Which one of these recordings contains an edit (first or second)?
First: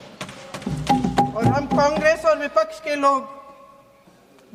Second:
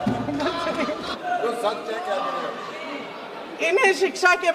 second